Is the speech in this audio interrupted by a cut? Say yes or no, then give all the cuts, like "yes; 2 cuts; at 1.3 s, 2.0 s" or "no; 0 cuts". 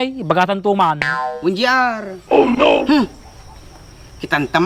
no; 0 cuts